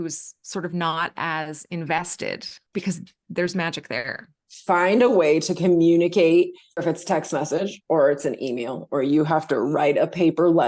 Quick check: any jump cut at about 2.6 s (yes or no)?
no